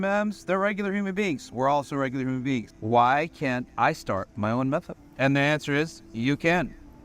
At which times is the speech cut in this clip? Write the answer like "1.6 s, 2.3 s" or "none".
none